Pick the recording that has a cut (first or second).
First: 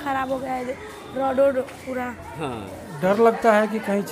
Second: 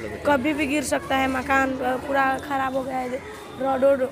first